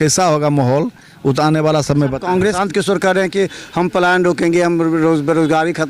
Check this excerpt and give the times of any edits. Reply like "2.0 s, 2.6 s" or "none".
2.6 s